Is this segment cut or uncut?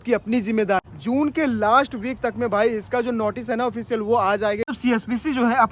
cut